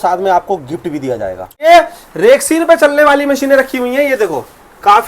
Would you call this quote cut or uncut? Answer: cut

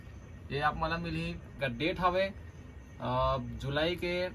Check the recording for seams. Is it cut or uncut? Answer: cut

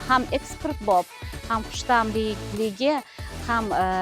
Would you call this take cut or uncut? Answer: uncut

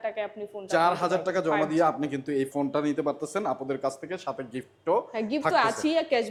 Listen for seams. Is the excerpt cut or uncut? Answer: uncut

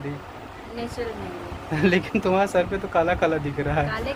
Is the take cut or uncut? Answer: uncut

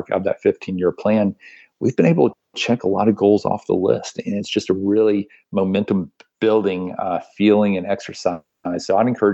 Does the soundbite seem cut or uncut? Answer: uncut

